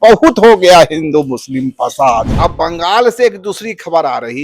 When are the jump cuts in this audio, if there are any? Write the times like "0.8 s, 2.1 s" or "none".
2.3 s